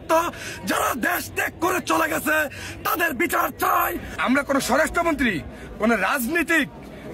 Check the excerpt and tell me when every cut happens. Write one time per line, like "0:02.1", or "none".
0:04.1

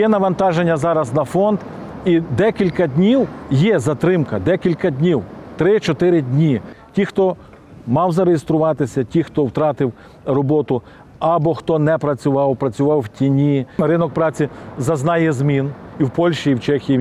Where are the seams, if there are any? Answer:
0:06.8
0:13.8

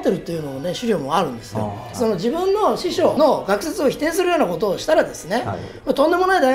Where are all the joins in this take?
0:01.8

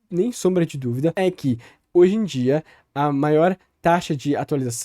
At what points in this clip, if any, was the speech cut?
0:01.1

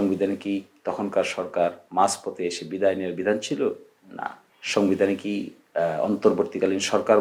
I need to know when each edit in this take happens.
none

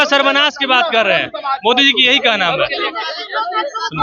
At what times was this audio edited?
none

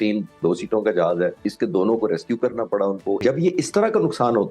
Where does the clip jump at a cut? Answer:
0:01.4
0:03.2

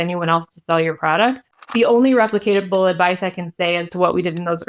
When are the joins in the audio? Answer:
0:01.5

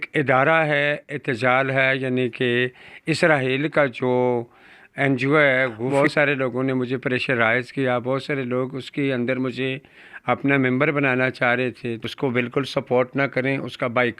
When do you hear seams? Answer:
0:05.8
0:12.1

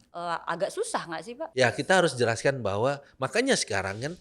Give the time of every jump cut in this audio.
0:01.5

